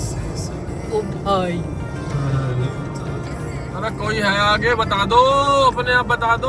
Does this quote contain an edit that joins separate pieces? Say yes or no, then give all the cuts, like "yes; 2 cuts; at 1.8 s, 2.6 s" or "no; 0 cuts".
no; 0 cuts